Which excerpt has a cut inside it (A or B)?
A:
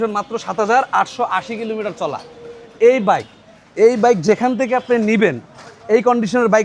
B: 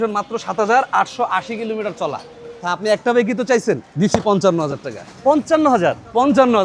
B